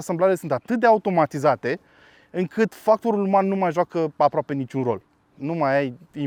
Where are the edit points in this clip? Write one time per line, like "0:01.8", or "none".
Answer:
none